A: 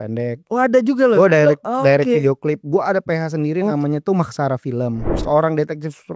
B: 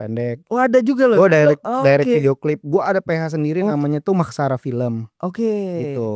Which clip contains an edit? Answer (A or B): A